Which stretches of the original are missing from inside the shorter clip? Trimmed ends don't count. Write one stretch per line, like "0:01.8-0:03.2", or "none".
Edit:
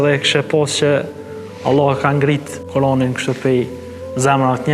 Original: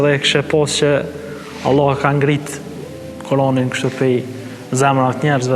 0:02.5-0:03.1